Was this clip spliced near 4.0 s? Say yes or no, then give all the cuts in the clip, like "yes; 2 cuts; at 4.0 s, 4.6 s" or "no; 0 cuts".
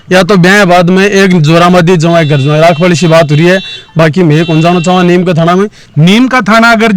no; 1 cut; at 5.8 s